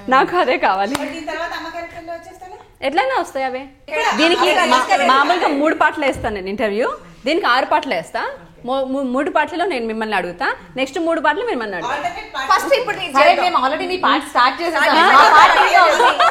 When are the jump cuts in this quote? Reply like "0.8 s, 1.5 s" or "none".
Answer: 3.9 s